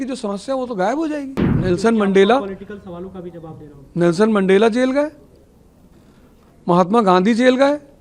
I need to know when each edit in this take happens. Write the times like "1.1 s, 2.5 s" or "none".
1.4 s